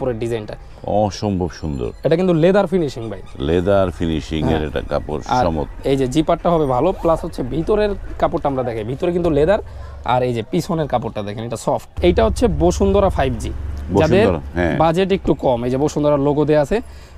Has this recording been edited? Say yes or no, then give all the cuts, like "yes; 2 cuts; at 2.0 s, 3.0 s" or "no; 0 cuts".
yes; 1 cut; at 12.0 s